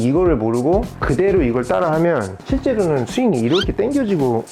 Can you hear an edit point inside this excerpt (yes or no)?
yes